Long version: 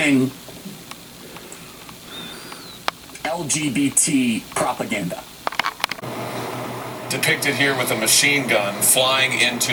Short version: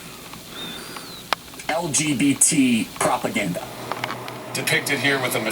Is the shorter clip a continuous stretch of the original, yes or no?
no